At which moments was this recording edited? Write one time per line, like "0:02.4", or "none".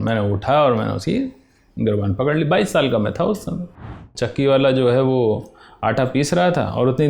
0:04.0